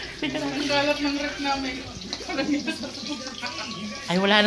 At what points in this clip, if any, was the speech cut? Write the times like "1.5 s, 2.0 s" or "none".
none

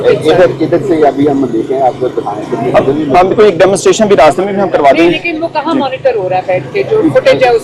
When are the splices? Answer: none

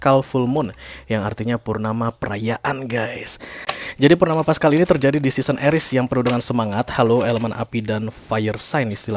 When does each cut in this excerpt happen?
3.6 s

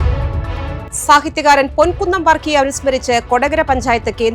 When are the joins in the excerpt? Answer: none

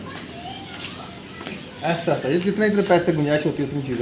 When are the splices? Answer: none

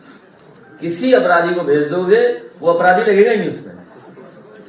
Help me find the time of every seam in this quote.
none

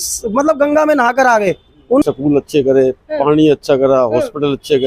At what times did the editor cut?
2.0 s

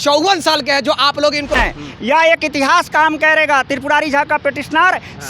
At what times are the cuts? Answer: 1.6 s

